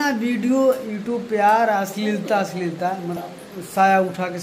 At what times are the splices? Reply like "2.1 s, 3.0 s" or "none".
3.2 s